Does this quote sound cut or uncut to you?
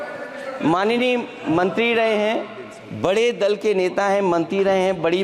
uncut